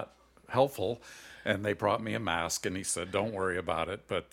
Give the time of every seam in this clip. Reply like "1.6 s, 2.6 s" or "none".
none